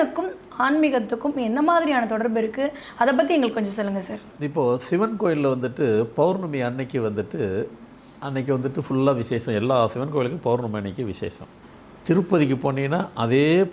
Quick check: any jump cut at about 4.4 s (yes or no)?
yes